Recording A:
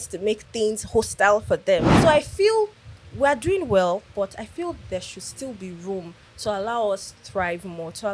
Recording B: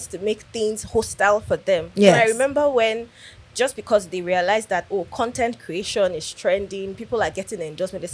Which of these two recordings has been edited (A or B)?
A